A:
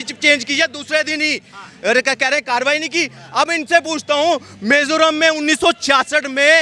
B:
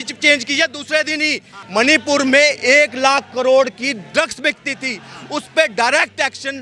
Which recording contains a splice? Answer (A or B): B